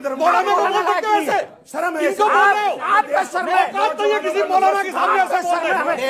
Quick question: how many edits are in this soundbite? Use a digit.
0